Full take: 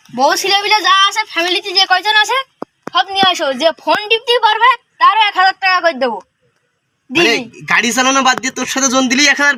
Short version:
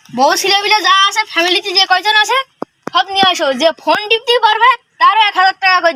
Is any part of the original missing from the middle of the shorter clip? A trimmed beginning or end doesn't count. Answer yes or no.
no